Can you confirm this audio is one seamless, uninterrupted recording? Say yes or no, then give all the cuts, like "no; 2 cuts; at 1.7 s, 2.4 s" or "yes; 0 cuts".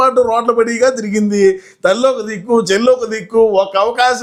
yes; 0 cuts